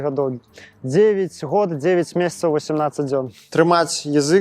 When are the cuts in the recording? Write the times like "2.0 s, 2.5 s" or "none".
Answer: 3.4 s